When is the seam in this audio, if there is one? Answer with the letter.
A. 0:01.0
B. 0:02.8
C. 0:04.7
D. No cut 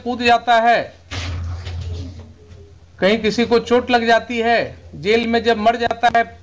D